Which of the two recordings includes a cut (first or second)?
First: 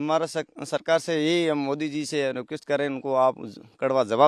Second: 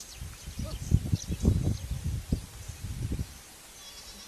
second